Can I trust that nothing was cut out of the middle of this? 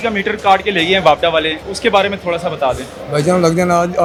yes; 0 cuts

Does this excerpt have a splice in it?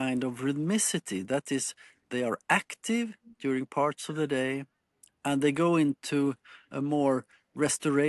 no; 0 cuts

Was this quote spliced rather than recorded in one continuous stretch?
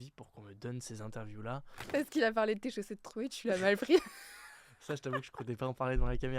yes; 1 cut; at 1.9 s

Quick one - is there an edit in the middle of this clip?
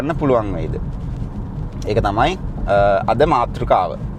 no; 0 cuts

